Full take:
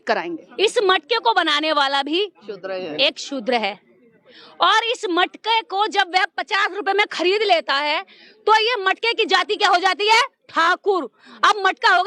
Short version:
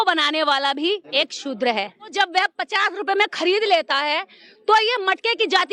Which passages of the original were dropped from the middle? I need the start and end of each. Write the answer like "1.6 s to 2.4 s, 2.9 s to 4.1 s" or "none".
2.4 s to 2.9 s, 4.0 s to 5.9 s